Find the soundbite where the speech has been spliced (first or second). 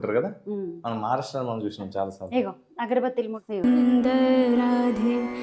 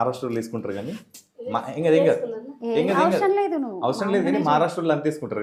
first